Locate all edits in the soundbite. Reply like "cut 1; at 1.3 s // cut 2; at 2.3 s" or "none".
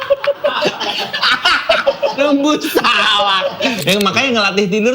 cut 1; at 3.8 s

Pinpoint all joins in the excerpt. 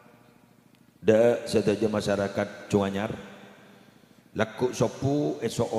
none

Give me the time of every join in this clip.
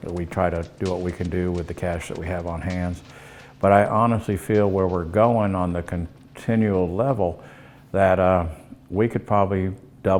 none

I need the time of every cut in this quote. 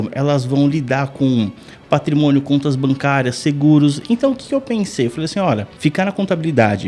cut 1; at 5.7 s

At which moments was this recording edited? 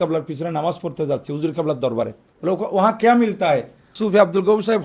cut 1; at 2.2 s // cut 2; at 3.9 s

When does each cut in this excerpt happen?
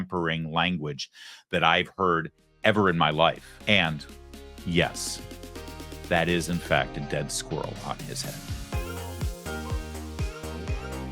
cut 1; at 3.5 s

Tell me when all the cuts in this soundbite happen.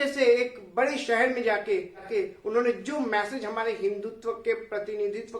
cut 1; at 2.1 s

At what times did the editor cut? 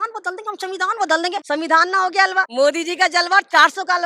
cut 1; at 1.4 s // cut 2; at 2.5 s

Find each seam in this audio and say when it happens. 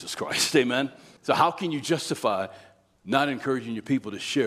cut 1; at 1.1 s

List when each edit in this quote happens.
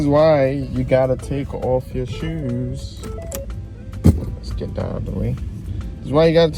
none

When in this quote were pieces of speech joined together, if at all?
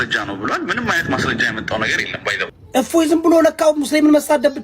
cut 1; at 2.6 s

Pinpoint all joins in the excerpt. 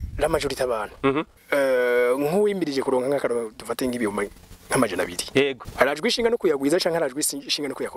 cut 1; at 1.4 s // cut 2; at 5.6 s

